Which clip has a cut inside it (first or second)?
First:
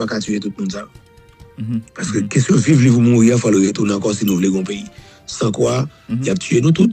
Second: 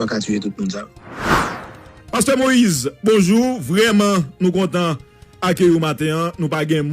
second